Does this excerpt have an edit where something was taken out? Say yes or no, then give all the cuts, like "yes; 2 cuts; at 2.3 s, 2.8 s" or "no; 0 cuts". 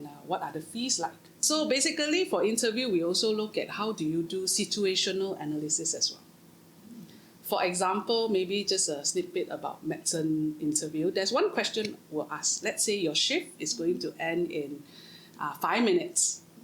yes; 1 cut; at 1.4 s